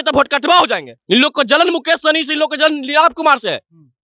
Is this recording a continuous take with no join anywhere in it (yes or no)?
no